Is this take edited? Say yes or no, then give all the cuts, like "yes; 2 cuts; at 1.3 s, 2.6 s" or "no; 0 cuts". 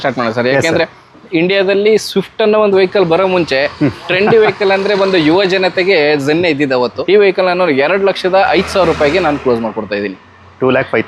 yes; 1 cut; at 7.0 s